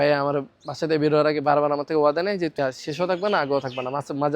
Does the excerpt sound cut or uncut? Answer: cut